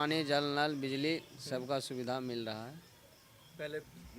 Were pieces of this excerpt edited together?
no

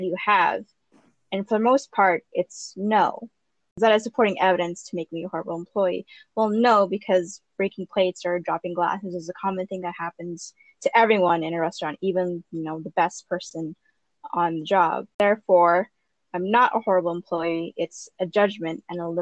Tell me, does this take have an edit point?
yes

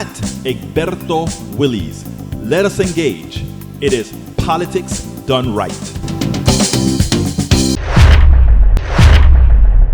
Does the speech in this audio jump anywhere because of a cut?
yes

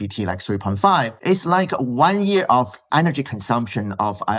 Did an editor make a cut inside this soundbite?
yes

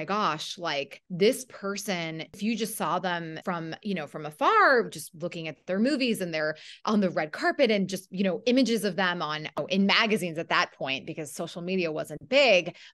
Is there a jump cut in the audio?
yes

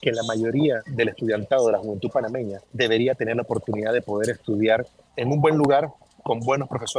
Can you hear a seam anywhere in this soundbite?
yes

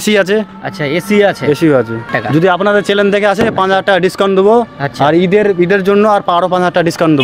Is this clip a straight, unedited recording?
no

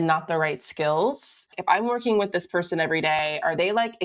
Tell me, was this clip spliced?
yes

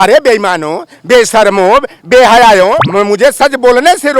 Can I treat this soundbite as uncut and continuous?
no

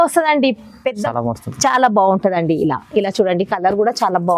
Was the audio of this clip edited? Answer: yes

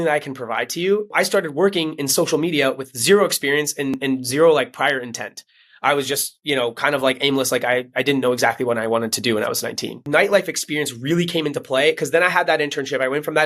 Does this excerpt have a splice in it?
yes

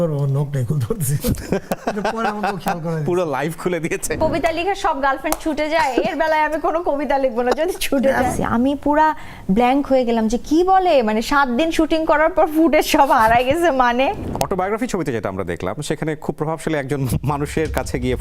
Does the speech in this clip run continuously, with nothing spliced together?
no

